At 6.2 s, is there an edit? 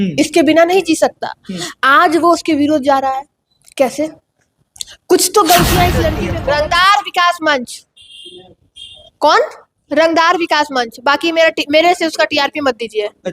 yes; 1 cut; at 6.2 s

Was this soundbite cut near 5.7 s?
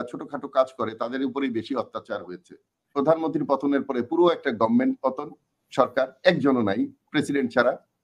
no; 1 cut; at 2.9 s

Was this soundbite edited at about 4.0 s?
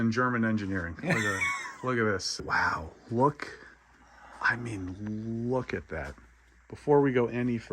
no; 1 cut; at 2.4 s

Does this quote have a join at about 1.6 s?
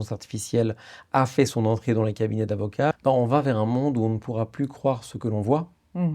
no; 1 cut; at 2.9 s

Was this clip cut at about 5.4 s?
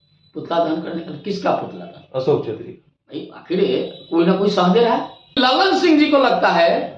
yes; 1 cut; at 5.4 s

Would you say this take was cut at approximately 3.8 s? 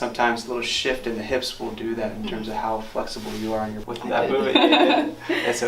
yes; 1 cut; at 3.8 s

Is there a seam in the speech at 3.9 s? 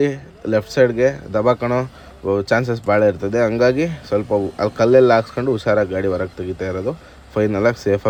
no; 0 cuts

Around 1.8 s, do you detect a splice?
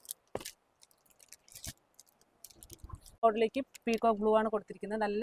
no; 1 cut; at 3.3 s

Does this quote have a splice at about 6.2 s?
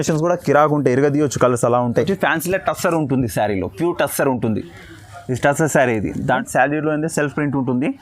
yes; 2 cuts; at 2.1 s, 6.2 s

